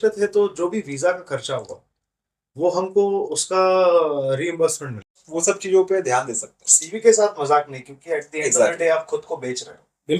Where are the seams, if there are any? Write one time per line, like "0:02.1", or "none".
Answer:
0:05.2